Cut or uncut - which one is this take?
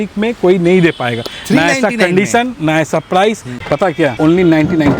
cut